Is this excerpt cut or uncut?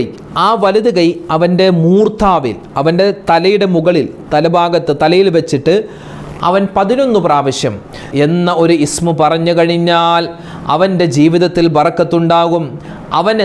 cut